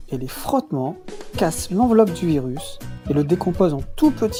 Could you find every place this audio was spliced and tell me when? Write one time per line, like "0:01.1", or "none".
none